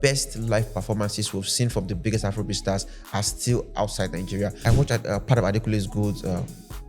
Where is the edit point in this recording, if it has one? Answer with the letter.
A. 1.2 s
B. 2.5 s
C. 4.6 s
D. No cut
C